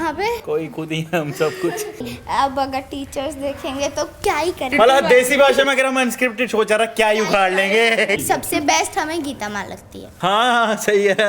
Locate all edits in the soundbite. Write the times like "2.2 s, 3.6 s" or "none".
2.2 s, 4.7 s, 8.2 s